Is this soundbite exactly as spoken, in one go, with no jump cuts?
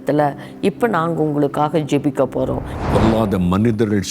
no; 1 cut; at 2.7 s

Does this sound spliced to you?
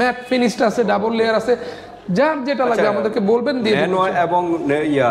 no; 0 cuts

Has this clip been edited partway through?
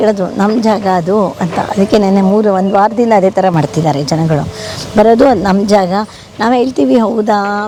no; 0 cuts

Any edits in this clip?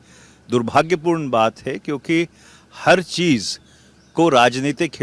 no; 0 cuts

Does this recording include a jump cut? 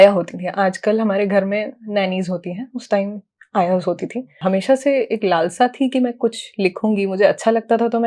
yes; 1 cut; at 4.3 s

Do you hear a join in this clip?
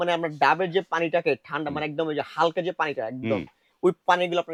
no; 0 cuts

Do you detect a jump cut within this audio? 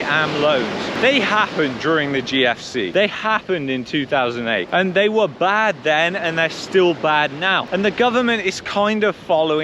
yes; 1 cut; at 0.9 s

